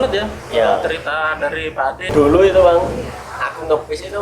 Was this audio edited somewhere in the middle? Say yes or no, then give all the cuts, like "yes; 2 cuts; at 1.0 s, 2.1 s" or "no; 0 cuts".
yes; 1 cut; at 2.0 s